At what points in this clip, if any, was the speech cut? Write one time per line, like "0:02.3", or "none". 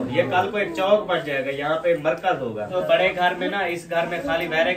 0:02.7

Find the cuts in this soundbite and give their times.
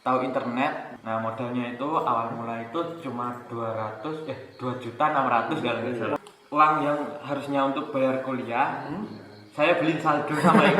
0:00.9
0:06.2

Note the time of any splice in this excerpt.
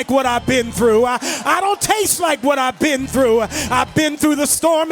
none

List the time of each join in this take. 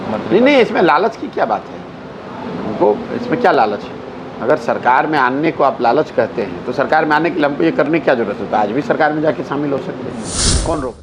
none

